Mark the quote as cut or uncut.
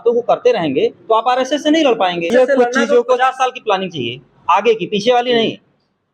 cut